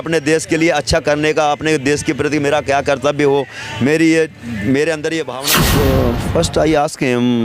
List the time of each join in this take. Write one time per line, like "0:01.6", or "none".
0:05.4